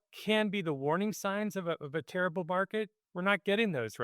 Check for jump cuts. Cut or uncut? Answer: cut